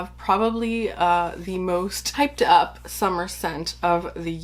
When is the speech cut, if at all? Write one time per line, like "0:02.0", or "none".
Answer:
0:02.0